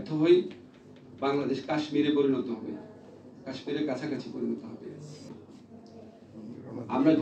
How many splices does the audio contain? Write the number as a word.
one